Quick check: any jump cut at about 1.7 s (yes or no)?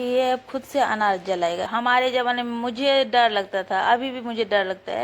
yes